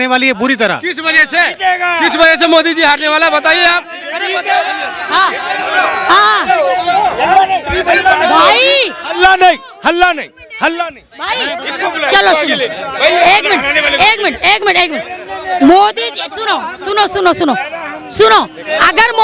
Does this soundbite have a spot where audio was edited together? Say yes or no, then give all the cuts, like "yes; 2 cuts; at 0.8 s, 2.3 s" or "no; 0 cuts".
no; 0 cuts